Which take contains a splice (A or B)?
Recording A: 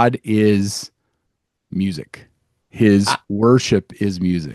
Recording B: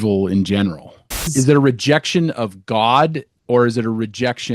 B